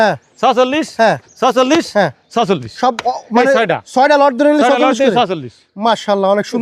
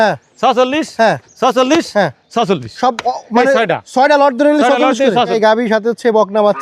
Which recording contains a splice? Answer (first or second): second